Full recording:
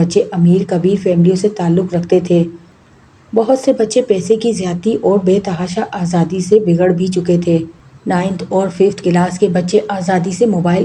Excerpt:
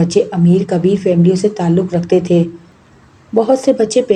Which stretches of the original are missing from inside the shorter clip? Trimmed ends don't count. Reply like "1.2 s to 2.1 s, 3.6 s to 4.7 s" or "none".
none

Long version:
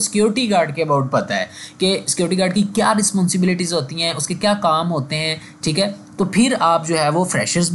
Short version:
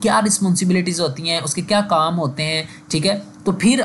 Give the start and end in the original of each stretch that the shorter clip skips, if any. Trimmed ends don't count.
none

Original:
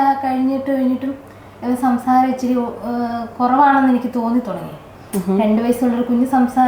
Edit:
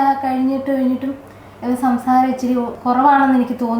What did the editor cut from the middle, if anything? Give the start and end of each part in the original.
2.7 s to 3.3 s

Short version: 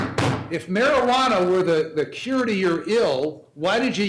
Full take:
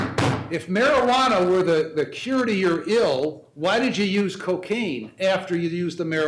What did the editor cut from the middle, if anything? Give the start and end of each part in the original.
none

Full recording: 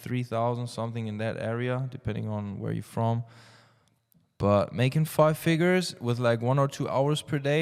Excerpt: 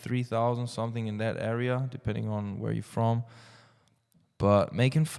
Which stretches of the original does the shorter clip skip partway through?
none

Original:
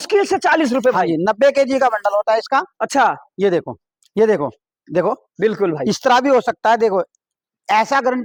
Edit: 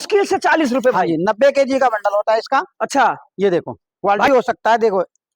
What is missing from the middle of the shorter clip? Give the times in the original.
4.2 s to 6.2 s

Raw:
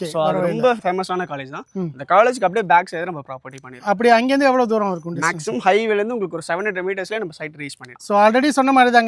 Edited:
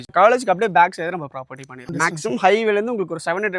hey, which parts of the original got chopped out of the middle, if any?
3.7 s to 5.0 s

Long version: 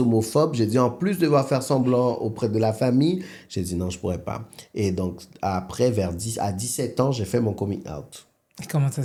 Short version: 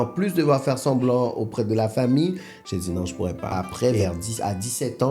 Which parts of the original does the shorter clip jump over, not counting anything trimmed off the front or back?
4.4 s to 5.5 s

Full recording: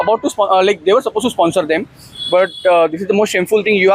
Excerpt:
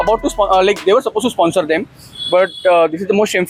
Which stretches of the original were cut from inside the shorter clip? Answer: none

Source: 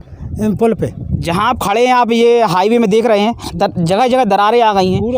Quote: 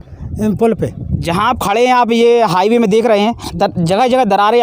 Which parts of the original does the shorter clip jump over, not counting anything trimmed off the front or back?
none

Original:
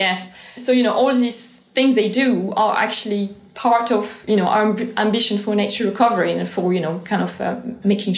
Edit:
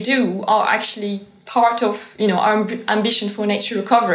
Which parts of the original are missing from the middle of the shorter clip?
none

